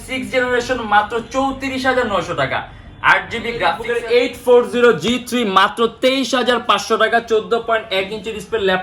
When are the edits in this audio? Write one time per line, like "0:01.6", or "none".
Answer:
0:03.8